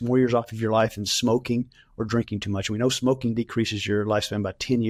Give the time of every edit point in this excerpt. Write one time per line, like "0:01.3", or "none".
none

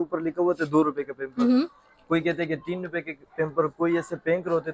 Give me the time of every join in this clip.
none

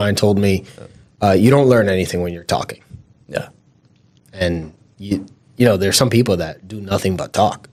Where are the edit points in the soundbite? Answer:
none

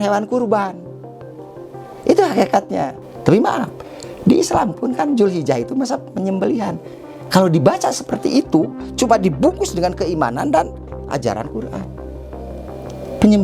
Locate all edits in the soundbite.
0:02.9

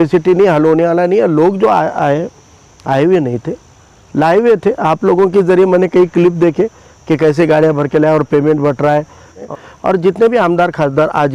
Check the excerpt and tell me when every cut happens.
0:09.4

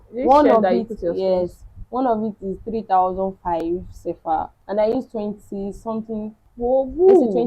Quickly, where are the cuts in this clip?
0:04.6
0:06.4

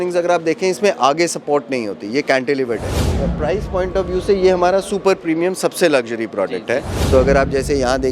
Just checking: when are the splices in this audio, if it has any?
0:03.2
0:06.9

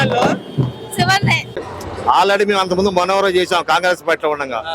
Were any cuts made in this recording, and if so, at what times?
0:01.5

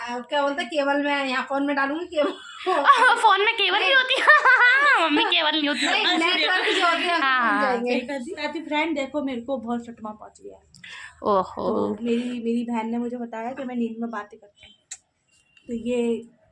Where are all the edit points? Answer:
0:08.1

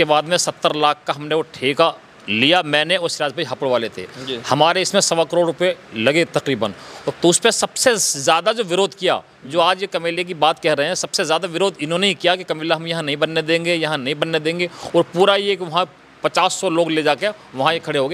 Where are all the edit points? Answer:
0:07.0

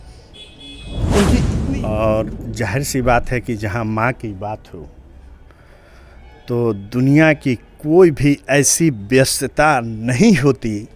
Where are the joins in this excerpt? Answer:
0:01.5

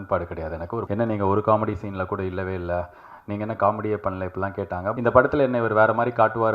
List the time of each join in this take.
0:00.8
0:04.9

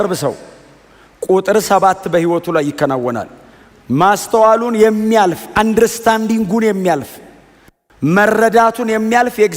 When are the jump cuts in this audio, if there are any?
none

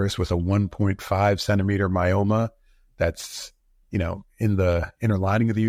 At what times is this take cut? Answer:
none

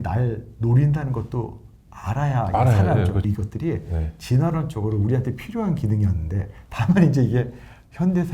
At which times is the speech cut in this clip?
0:03.2

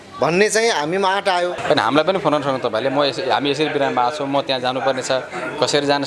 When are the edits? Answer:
0:01.6

